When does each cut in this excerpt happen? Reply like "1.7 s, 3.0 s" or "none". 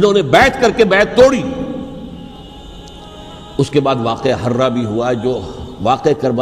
2.4 s